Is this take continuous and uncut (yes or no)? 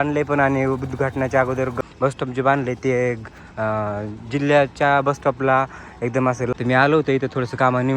no